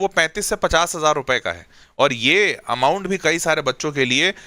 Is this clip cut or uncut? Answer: uncut